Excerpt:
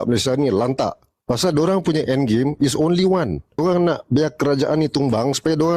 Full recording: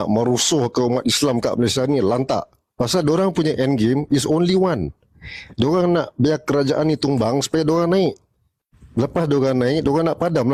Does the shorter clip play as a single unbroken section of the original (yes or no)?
no